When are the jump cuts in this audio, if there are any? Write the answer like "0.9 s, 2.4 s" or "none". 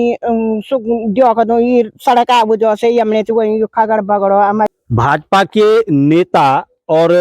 4.7 s

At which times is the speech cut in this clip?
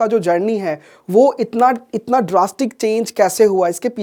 none

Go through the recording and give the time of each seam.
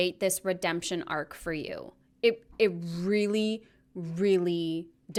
none

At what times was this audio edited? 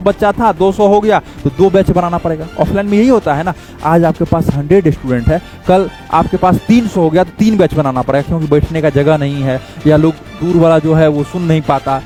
none

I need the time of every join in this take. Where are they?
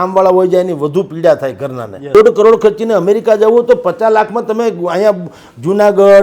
2.1 s

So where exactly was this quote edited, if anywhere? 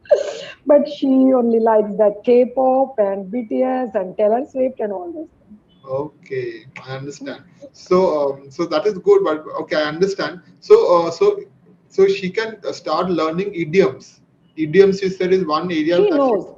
none

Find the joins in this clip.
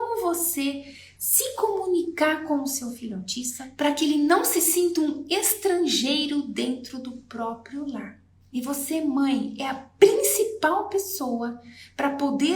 none

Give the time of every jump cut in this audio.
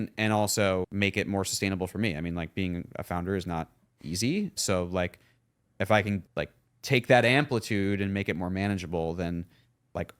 0.9 s, 4.6 s, 6.3 s

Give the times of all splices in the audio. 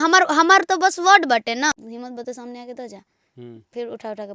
1.9 s

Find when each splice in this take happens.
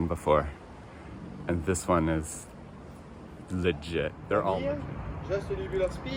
4.6 s

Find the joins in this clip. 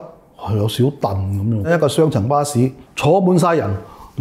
1.7 s

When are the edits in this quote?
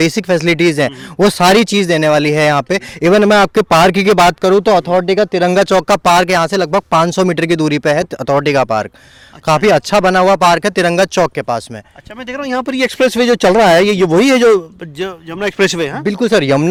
none

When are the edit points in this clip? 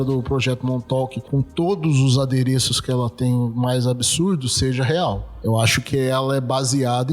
1.2 s, 5.3 s

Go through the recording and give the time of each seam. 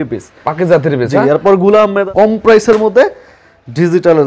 2.0 s

